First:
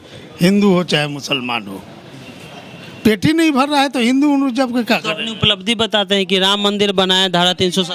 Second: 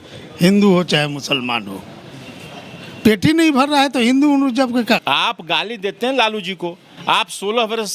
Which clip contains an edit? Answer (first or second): second